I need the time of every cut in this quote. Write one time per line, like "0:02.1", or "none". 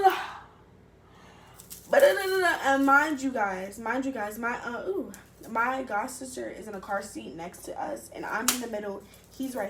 none